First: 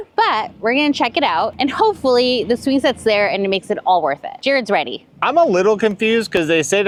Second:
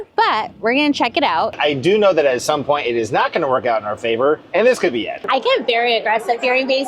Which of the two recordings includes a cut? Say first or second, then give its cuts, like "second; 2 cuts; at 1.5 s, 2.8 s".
second; 2 cuts; at 1.5 s, 5.2 s